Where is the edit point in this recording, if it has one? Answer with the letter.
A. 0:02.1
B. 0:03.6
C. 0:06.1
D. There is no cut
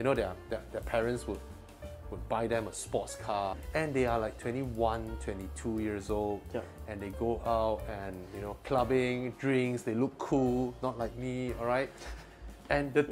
B